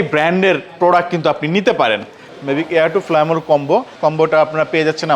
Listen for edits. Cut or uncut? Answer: cut